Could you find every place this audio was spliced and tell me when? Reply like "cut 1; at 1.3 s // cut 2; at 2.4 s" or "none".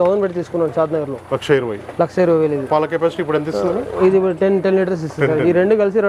none